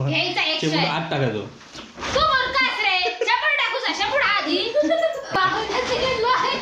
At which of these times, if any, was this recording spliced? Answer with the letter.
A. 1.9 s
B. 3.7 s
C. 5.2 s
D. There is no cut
D